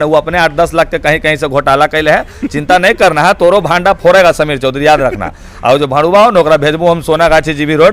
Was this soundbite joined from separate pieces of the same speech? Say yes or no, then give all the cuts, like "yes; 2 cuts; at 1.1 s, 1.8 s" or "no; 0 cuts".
no; 0 cuts